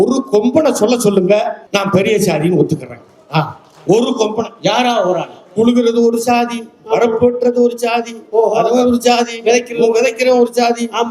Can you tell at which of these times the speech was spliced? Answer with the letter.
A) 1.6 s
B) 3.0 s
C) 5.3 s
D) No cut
A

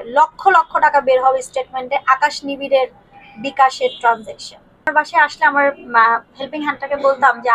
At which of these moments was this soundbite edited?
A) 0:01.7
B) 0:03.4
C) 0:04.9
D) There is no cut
C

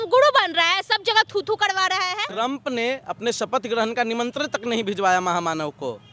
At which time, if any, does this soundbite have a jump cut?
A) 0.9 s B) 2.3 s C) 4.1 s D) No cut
B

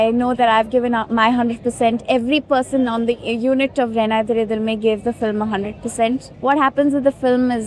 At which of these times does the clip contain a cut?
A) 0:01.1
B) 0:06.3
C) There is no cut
B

